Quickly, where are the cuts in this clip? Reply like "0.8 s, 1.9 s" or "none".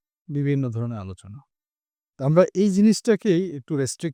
none